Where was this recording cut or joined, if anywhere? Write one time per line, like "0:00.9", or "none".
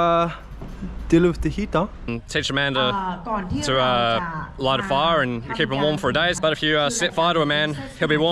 0:02.1
0:06.4

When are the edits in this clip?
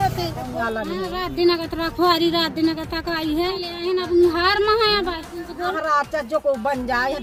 none

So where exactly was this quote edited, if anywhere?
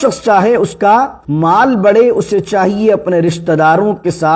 0:01.2

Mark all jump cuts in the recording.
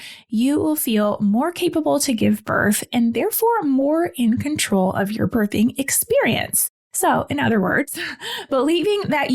0:06.9

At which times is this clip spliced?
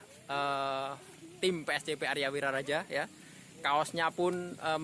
none

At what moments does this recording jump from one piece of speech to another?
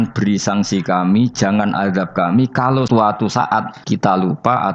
0:02.9
0:03.7

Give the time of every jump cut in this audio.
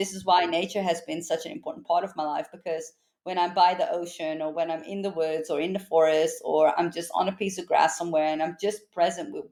none

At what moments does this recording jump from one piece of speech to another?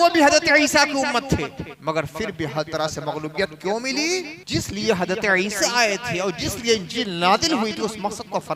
0:01.7
0:04.4

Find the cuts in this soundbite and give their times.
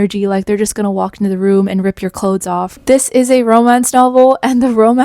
0:02.8

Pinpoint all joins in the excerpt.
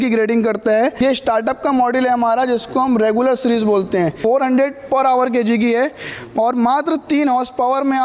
0:00.9
0:04.2

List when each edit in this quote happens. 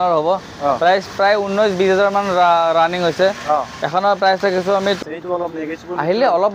0:05.0

